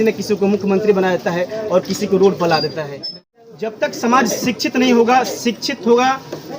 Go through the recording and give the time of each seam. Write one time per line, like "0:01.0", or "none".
0:03.3